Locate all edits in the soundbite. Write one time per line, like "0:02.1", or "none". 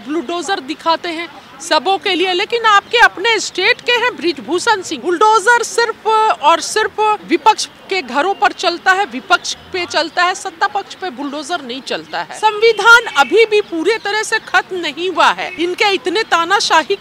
0:04.9
0:07.2
0:12.2
0:15.5